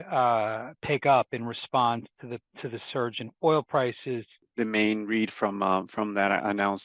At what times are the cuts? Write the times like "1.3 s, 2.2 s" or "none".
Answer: 4.4 s

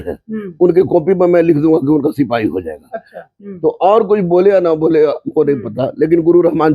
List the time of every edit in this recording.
3.2 s

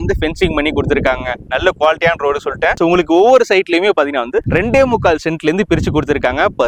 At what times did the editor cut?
none

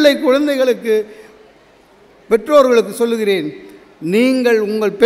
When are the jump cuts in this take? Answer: none

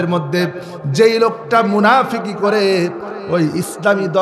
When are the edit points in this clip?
none

